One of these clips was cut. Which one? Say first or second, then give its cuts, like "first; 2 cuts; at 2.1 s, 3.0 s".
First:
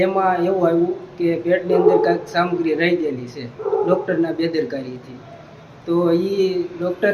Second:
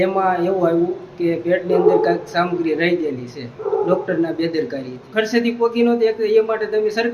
second; 1 cut; at 5.0 s